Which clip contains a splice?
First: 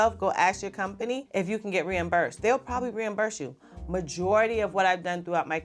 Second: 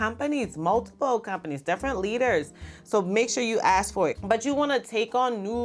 second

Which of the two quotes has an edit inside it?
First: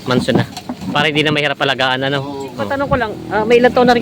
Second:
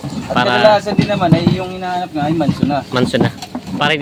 first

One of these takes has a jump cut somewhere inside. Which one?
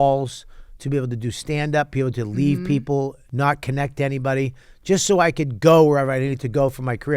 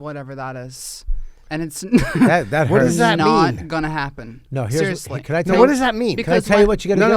first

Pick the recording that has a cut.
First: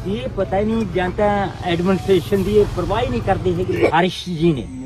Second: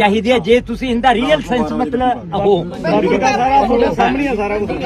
first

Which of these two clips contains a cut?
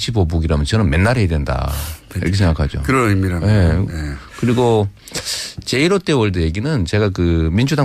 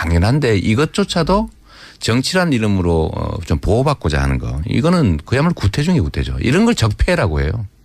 second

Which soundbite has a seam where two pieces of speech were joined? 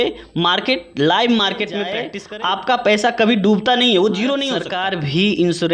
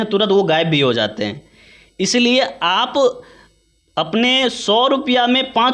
first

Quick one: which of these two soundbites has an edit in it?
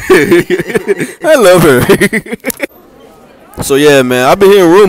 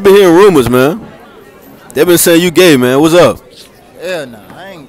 first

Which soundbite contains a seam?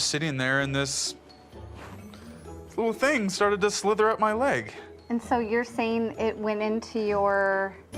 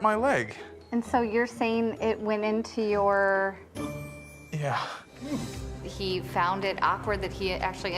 second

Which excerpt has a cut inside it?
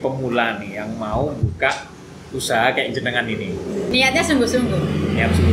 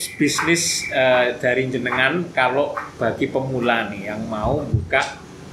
first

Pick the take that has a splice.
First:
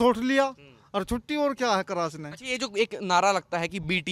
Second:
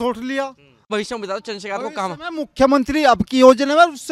second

